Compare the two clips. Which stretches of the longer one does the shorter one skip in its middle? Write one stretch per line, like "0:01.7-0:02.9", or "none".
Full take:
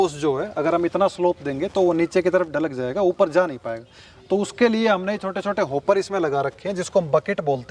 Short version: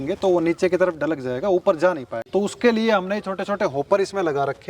0:03.7-0:04.1